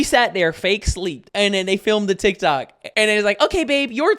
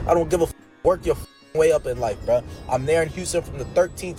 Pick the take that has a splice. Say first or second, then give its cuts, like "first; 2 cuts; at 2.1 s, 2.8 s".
first; 2 cuts; at 1.2 s, 2.8 s